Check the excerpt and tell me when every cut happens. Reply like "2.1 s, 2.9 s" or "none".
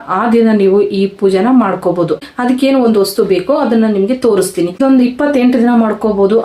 2.3 s, 4.8 s